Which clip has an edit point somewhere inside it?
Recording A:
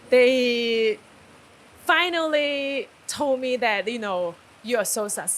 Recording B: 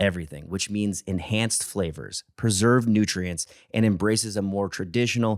A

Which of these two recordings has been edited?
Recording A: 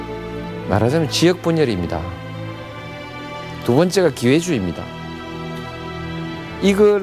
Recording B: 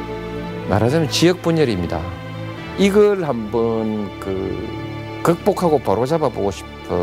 B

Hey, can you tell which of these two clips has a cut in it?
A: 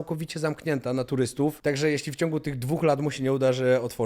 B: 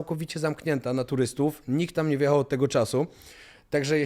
A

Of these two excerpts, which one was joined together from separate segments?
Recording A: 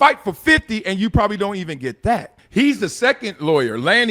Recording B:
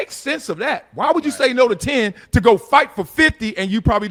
A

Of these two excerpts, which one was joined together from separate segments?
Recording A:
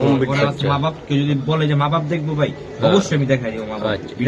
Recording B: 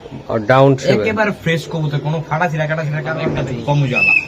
B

